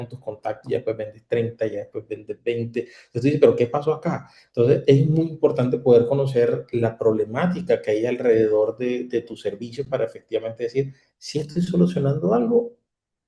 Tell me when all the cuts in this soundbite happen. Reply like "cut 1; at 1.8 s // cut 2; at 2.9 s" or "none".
none